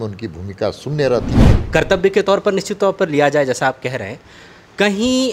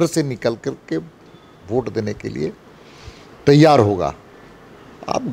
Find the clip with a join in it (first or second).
first